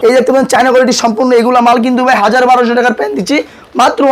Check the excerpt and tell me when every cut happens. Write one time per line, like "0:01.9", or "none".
none